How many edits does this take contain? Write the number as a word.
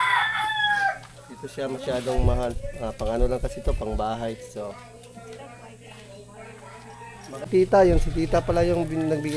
one